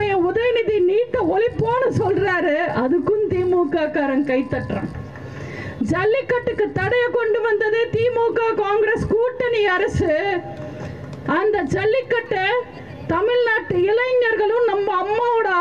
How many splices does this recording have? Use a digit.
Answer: 0